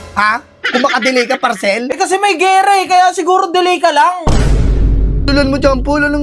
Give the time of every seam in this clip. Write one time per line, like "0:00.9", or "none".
none